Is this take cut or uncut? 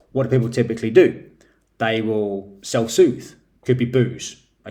uncut